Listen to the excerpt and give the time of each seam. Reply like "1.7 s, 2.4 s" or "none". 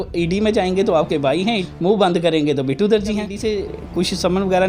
1.7 s, 3.3 s

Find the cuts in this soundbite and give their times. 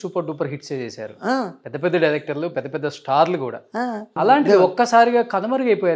4.1 s

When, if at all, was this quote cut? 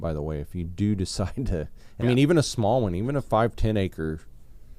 1.8 s

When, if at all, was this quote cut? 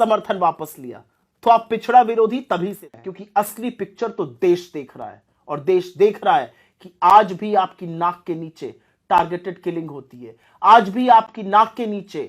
2.8 s

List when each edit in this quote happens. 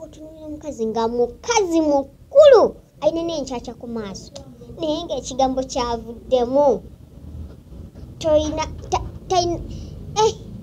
none

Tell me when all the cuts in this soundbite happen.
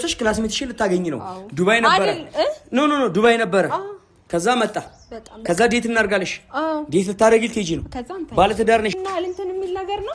8.9 s

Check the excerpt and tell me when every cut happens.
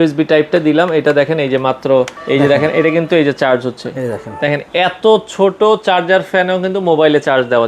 2.2 s

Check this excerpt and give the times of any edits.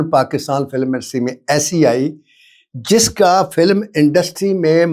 none

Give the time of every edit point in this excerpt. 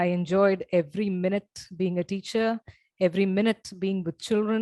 none

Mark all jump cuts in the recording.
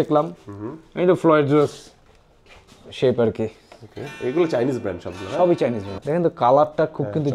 5.9 s

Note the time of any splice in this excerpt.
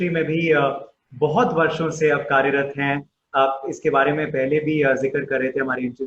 none

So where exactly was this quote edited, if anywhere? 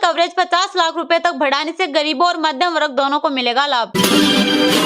3.9 s

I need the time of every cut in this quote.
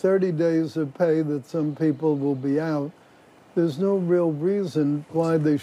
none

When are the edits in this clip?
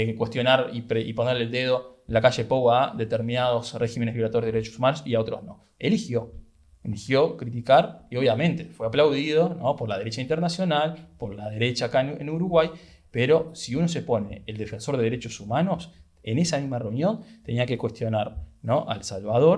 none

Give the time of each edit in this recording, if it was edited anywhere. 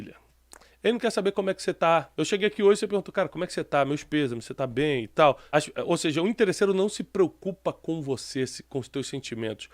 2.1 s, 5.4 s

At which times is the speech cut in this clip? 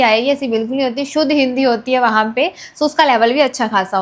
none

